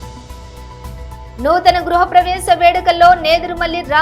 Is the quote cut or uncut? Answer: uncut